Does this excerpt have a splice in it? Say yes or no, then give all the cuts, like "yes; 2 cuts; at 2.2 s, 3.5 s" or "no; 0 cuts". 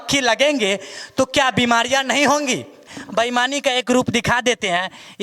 yes; 1 cut; at 3.0 s